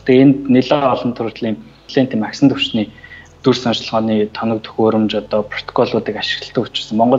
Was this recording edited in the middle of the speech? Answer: yes; 1 cut; at 1.8 s

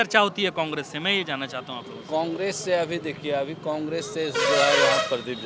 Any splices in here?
no; 0 cuts

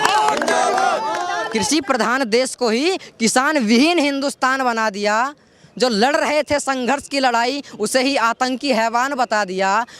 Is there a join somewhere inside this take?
yes; 1 cut; at 1.4 s

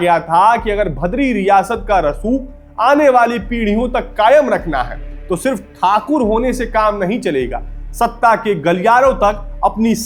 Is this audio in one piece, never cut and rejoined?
yes; 0 cuts

